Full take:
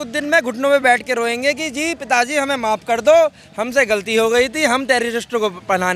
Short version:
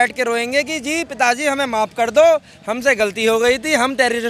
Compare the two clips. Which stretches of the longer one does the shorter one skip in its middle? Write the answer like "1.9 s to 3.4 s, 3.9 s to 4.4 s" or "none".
none